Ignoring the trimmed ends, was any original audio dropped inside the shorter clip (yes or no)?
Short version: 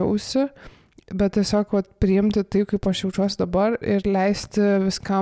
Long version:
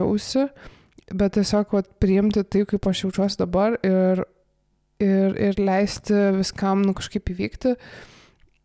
yes